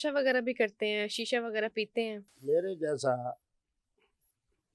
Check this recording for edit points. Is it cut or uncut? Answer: cut